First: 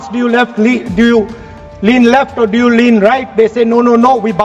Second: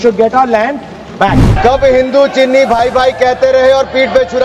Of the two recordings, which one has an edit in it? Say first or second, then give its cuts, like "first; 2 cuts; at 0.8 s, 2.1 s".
second; 1 cut; at 1.5 s